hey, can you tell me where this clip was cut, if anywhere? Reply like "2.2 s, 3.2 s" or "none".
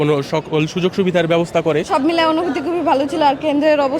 1.9 s